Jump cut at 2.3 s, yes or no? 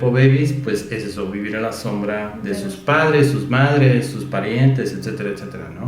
yes